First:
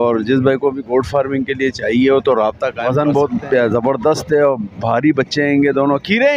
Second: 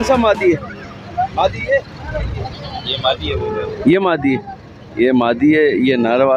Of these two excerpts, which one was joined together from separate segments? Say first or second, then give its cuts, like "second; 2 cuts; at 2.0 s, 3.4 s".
first; 1 cut; at 2.7 s